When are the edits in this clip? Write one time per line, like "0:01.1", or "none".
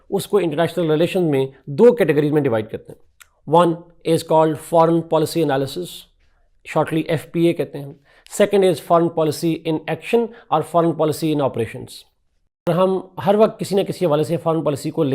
0:12.7